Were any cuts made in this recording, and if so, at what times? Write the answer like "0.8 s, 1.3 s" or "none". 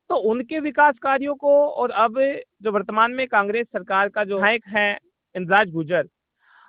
4.3 s